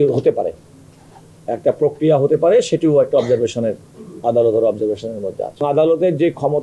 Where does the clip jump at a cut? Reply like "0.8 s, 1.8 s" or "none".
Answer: 5.6 s